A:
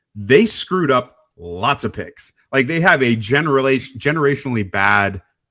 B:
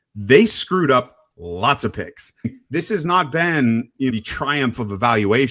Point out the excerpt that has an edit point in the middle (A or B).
B